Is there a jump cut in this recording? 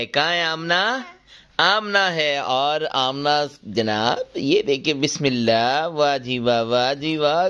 no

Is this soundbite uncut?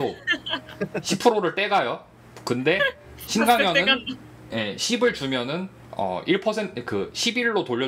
yes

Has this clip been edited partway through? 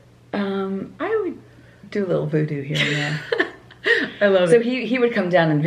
no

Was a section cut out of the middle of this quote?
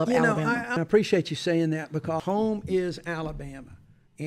yes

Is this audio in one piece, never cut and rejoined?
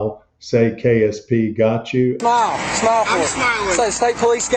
no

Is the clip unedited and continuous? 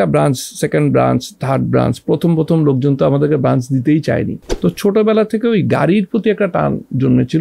no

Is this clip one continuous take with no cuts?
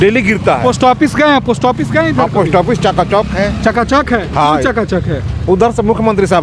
yes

